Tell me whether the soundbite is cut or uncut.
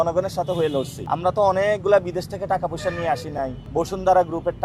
cut